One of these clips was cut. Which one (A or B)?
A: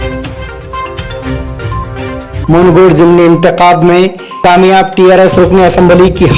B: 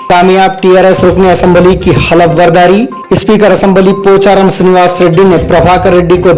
A